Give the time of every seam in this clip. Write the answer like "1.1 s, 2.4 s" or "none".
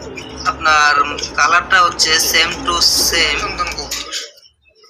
3.5 s